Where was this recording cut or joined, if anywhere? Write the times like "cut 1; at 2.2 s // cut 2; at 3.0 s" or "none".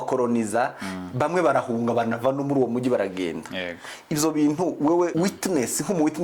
cut 1; at 5.1 s

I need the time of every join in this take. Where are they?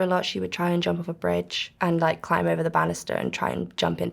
cut 1; at 1.6 s

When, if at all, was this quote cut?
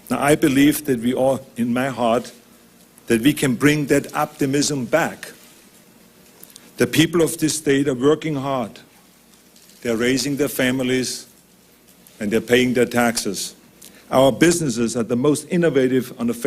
cut 1; at 1.9 s

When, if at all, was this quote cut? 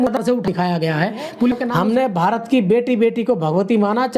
cut 1; at 1.6 s

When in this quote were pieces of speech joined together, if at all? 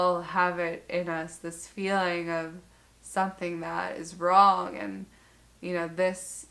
none

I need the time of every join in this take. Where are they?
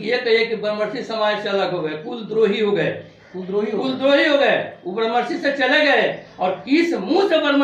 none

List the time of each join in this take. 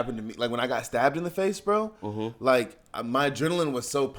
none

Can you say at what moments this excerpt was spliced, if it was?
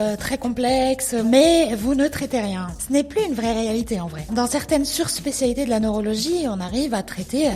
cut 1; at 1.2 s // cut 2; at 2.7 s

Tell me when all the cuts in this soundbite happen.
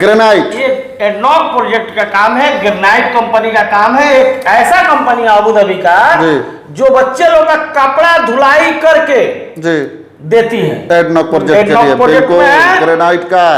none

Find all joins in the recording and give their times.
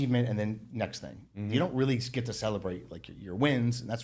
none

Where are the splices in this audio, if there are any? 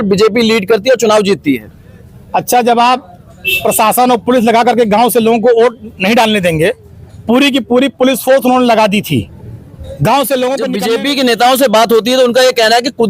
cut 1; at 10.8 s

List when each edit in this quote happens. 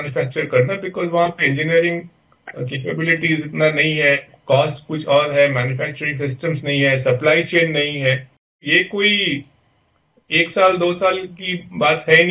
cut 1; at 8.6 s

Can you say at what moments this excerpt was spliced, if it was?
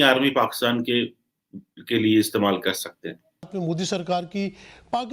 cut 1; at 3.4 s

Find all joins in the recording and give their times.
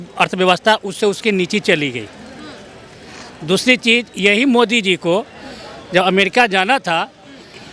none

